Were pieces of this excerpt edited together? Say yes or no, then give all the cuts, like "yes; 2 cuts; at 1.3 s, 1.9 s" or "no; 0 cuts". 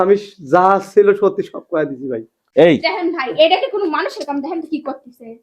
yes; 1 cut; at 2.4 s